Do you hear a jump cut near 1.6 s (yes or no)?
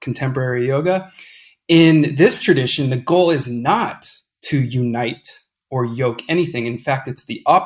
no